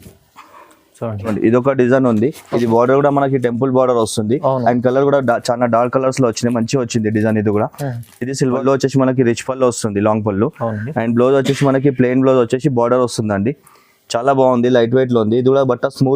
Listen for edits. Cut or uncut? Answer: cut